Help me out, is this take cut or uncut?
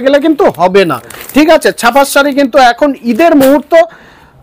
uncut